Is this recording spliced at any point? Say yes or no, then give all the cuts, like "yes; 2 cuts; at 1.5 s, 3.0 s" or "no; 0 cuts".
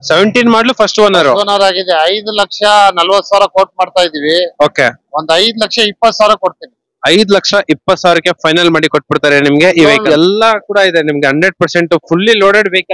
yes; 1 cut; at 10.0 s